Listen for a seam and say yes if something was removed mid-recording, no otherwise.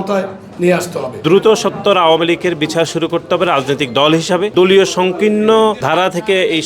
yes